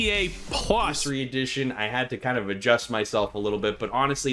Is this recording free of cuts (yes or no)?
no